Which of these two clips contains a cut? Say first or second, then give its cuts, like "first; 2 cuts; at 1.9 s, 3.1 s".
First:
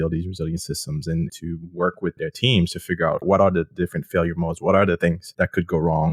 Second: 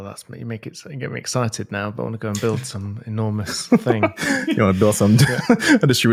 first; 4 cuts; at 1.3 s, 2.2 s, 3.2 s, 5.2 s